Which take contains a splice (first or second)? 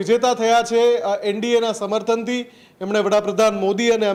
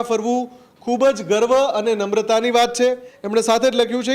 second